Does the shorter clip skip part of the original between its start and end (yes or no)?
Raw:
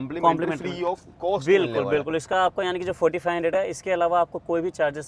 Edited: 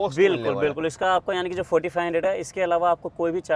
no